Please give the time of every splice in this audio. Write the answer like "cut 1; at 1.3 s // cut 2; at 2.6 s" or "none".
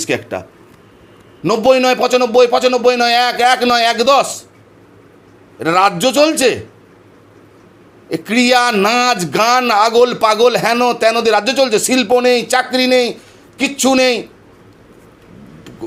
none